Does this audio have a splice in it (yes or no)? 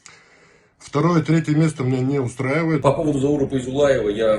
yes